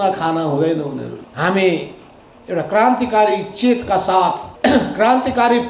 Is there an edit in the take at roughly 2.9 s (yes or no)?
no